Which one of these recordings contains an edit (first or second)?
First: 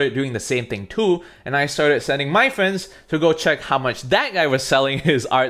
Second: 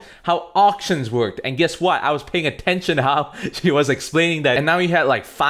second